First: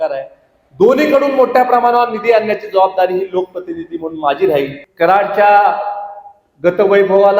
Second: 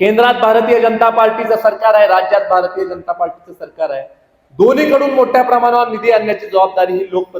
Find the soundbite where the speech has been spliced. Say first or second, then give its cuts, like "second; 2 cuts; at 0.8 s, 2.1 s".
first; 1 cut; at 4.8 s